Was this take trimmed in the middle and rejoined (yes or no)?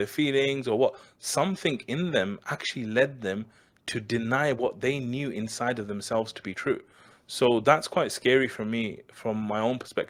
no